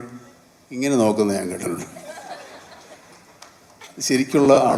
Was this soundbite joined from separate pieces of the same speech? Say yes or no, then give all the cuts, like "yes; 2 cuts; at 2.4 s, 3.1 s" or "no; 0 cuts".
no; 0 cuts